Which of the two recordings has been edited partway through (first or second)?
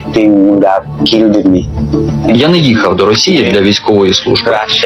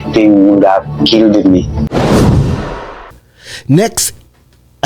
second